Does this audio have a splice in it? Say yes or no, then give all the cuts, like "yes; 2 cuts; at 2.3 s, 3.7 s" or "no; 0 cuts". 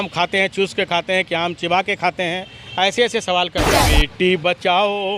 yes; 1 cut; at 3.7 s